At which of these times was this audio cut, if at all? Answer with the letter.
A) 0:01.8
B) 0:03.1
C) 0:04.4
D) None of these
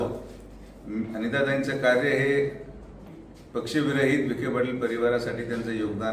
B